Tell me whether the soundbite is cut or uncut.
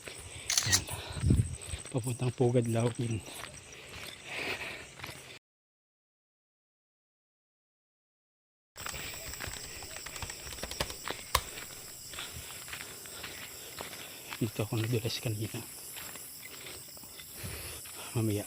uncut